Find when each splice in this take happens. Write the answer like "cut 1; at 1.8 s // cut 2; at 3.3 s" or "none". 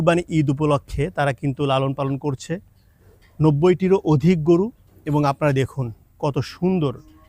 none